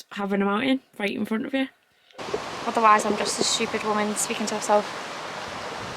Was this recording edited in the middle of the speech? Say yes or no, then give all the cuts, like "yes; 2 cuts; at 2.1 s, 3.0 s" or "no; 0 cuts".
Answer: yes; 1 cut; at 2.2 s